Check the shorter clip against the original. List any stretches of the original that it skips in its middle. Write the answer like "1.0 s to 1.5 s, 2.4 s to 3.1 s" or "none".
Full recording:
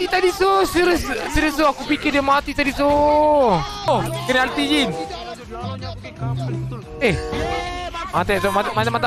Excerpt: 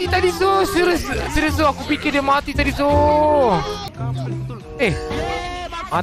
3.7 s to 5.9 s